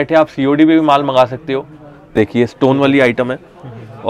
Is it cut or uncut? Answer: cut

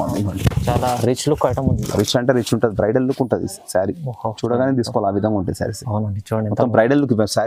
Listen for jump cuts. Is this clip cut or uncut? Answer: uncut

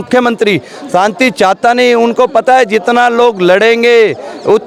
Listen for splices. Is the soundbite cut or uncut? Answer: uncut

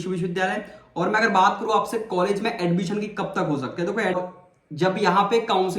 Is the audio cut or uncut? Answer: cut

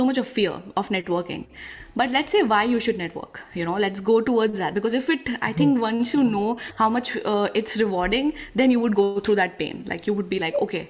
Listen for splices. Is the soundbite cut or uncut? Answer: uncut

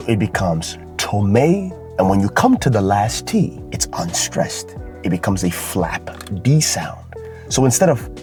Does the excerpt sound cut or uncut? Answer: uncut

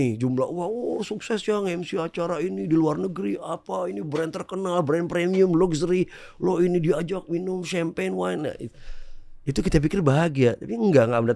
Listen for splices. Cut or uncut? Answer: uncut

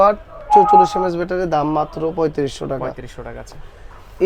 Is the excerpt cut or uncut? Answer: uncut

